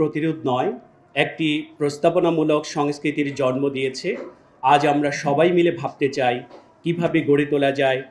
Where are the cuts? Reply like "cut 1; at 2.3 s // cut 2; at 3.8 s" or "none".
none